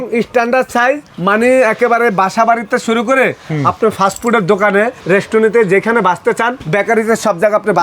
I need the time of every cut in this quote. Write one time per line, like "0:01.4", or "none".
0:05.0
0:06.6